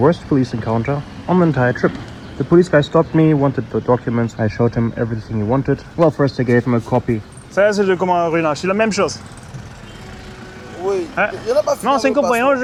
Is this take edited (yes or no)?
no